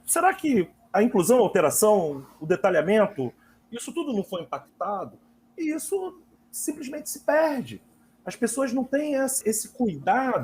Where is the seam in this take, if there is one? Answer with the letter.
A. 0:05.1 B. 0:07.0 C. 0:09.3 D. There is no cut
C